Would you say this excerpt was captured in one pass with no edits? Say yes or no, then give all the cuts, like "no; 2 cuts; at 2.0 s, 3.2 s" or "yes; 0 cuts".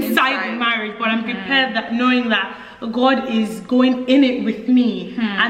yes; 0 cuts